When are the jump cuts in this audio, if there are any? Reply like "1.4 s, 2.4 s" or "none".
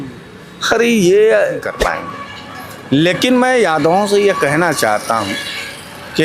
1.8 s